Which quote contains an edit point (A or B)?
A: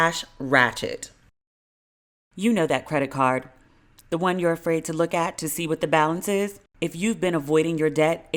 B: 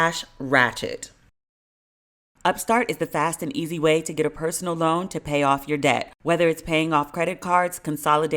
B